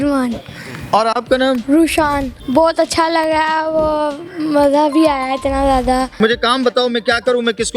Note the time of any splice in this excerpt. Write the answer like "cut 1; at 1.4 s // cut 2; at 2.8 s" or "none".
cut 1; at 2.4 s // cut 2; at 6.2 s